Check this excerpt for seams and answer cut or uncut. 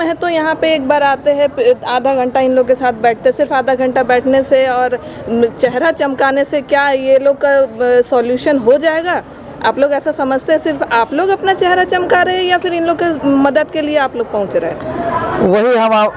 uncut